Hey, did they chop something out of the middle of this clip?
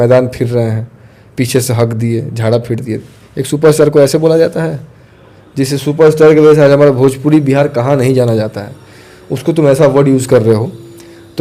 no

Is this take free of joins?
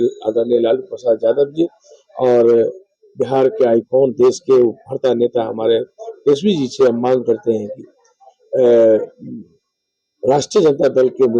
yes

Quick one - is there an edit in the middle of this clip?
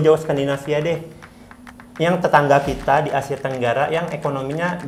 no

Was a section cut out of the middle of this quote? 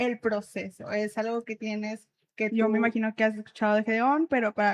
yes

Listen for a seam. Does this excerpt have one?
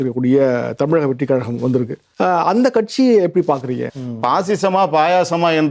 yes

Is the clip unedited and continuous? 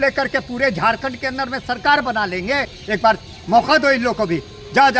no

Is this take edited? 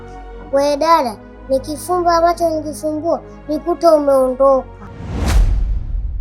yes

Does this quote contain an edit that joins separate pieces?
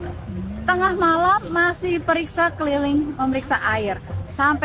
no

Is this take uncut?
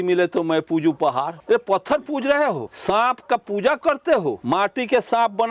no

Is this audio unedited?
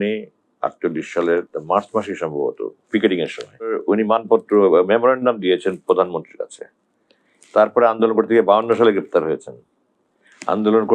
no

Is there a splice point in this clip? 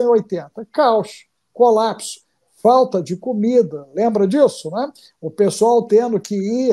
no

